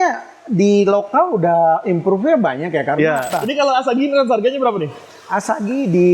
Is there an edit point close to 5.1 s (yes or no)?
no